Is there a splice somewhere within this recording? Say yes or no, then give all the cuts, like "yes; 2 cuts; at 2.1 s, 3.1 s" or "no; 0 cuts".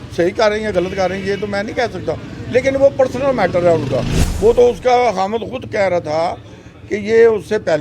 yes; 1 cut; at 4.2 s